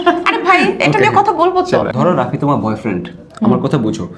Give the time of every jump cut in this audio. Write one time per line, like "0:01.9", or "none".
0:01.9